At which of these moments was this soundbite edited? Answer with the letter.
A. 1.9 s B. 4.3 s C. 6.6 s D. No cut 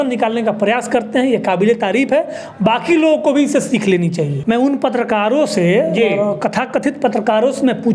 B